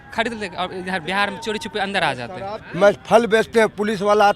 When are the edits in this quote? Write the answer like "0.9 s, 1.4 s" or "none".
2.6 s